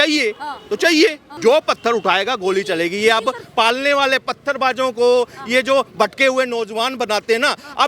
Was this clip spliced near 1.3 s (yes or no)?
yes